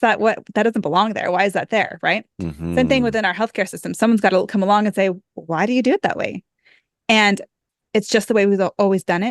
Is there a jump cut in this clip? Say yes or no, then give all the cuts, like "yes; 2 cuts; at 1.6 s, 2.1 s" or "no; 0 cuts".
no; 0 cuts